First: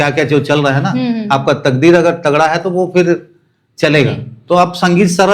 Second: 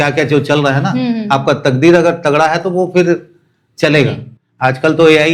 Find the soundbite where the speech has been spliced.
second; 1 cut; at 4.3 s

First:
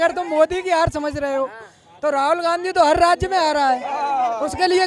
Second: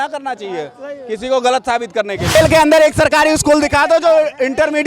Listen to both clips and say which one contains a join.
second; 1 cut; at 2.2 s

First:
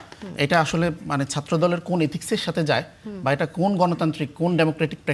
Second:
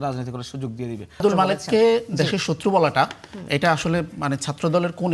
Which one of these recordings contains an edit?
second; 1 cut; at 1.2 s

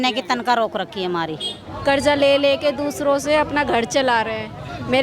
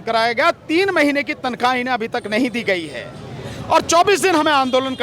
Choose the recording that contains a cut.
first; 1 cut; at 1.6 s

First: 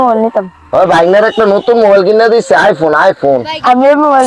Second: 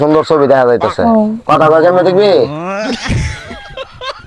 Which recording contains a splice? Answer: second; 2 cuts; at 1.4 s, 2.6 s

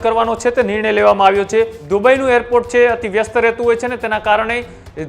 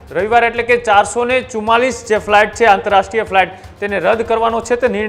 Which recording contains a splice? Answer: first; 1 cut; at 1.8 s

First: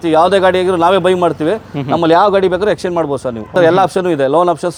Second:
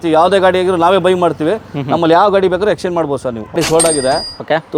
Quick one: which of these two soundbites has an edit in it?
second; 1 cut; at 3.6 s

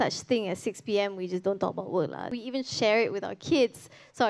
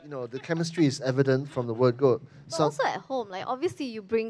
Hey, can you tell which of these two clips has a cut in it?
first; 1 cut; at 2.3 s

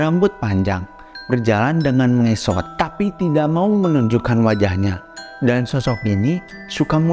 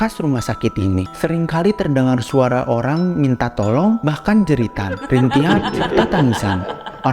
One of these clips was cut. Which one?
second; 1 cut; at 1.1 s

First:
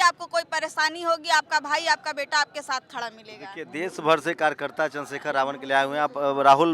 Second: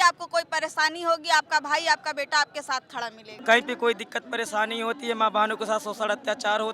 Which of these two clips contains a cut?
second; 1 cut; at 3.3 s

